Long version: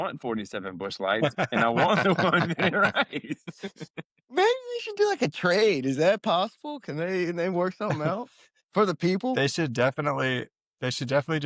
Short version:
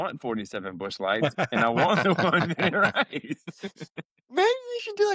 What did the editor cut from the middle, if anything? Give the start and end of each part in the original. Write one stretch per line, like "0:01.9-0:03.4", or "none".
none